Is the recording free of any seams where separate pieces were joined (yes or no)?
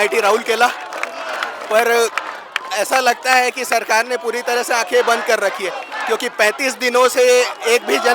yes